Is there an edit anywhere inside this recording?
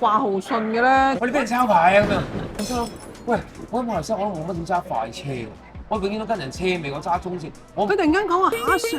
yes; 2 cuts; at 1.2 s, 7.9 s

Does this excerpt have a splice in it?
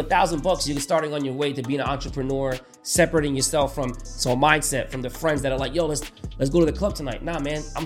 no; 0 cuts

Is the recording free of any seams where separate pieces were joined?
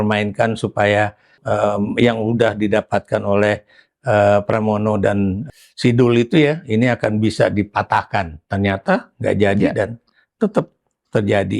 no; 2 cuts; at 1.4 s, 5.4 s

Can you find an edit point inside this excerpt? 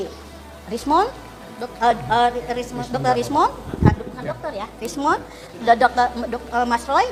no; 0 cuts

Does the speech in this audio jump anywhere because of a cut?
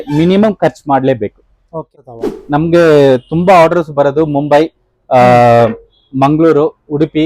yes; 1 cut; at 1.9 s

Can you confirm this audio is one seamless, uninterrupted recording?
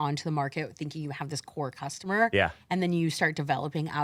yes; 0 cuts

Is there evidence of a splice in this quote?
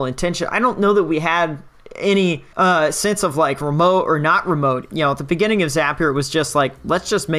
yes; 2 cuts; at 2.5 s, 4.8 s

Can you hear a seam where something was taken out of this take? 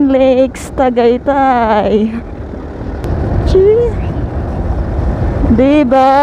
yes; 1 cut; at 3.0 s

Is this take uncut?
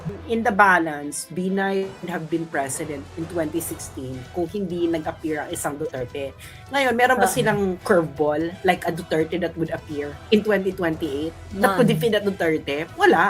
no; 3 cuts; at 2.0 s, 3.1 s, 10.1 s

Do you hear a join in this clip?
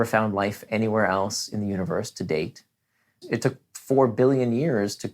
yes; 1 cut; at 3.1 s

